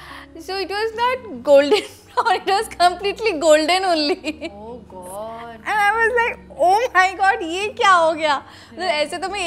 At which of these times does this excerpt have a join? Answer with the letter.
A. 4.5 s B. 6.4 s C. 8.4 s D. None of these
D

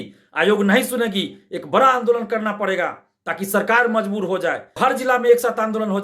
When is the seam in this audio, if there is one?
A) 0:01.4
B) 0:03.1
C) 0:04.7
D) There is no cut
C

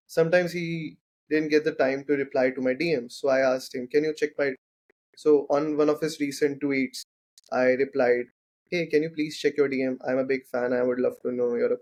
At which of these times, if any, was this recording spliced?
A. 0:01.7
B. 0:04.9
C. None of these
C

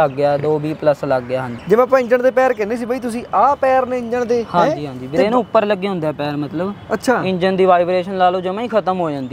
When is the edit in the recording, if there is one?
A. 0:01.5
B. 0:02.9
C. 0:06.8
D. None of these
A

